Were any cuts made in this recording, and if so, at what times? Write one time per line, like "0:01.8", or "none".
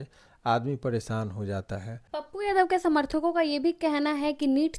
0:01.9